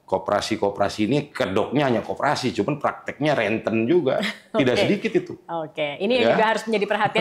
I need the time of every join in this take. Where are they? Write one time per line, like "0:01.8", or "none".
none